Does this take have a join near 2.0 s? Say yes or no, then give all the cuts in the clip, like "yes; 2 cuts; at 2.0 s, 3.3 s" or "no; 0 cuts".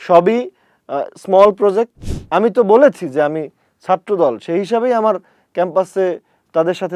yes; 1 cut; at 2.0 s